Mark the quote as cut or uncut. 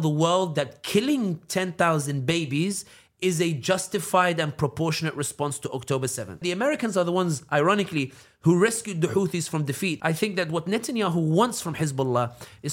cut